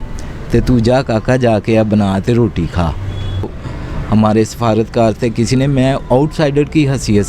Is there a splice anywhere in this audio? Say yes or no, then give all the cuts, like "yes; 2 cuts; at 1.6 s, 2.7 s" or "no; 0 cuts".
yes; 1 cut; at 3.4 s